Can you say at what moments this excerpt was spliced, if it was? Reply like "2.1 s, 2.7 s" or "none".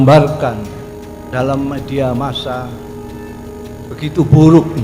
2.7 s, 3.9 s